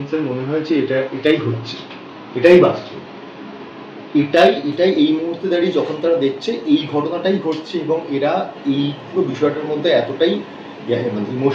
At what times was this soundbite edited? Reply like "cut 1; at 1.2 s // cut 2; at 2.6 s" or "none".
none